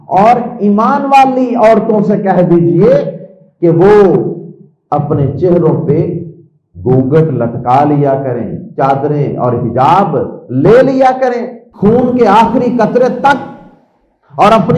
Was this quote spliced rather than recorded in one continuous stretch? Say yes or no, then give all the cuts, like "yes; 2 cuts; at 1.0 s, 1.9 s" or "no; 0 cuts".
yes; 1 cut; at 11.8 s